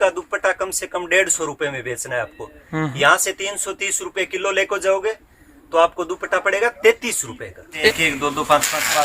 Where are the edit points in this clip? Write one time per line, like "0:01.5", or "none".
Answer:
0:07.9